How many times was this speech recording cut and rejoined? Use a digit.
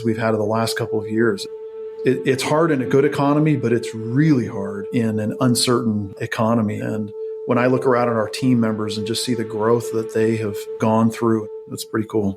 2